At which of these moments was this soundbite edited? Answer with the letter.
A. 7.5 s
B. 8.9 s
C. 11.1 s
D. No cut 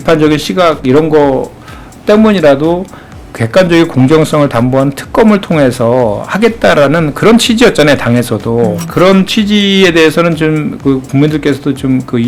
B